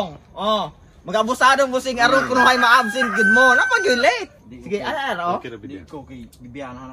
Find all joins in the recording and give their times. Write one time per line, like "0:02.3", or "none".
0:04.3